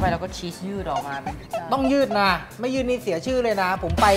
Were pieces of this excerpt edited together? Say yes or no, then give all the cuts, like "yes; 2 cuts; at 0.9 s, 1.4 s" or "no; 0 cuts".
no; 0 cuts